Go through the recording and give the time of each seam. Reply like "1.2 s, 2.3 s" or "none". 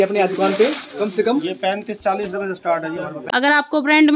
3.2 s